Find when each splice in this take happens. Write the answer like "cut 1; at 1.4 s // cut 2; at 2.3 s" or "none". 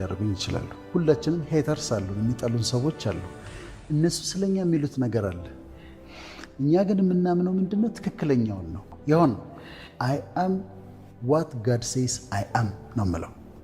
cut 1; at 9.0 s